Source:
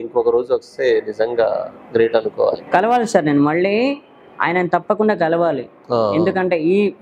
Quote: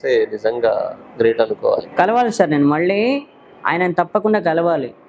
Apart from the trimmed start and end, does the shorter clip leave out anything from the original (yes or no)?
no